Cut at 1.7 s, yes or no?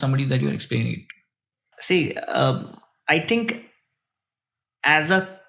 yes